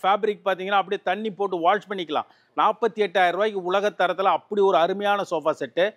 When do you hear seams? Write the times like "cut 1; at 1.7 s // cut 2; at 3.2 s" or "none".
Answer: none